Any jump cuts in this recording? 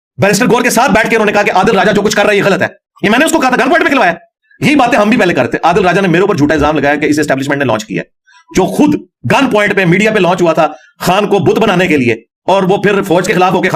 no; 0 cuts

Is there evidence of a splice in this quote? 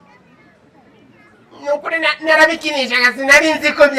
no; 0 cuts

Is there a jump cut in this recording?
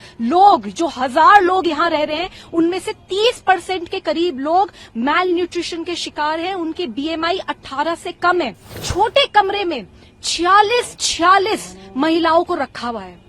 yes; 1 cut; at 8.8 s

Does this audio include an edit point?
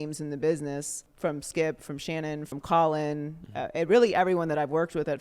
yes; 2 cuts; at 1.0 s, 2.5 s

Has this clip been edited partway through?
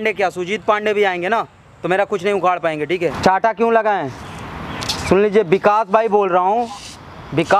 yes; 1 cut; at 3.2 s

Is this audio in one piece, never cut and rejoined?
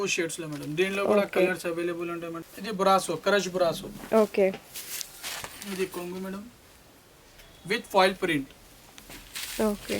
no; 1 cut; at 2.3 s

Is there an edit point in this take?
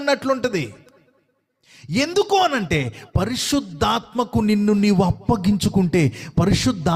no; 0 cuts

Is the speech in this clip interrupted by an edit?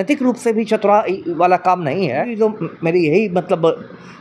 yes; 1 cut; at 2.3 s

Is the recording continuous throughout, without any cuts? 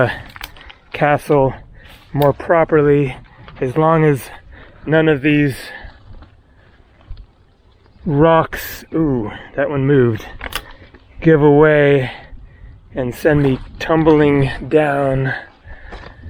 yes; 0 cuts

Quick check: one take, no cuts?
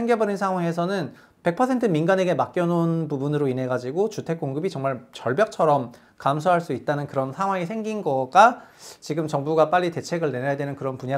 yes; 0 cuts

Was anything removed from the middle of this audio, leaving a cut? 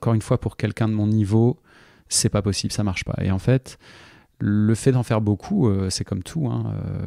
no; 0 cuts

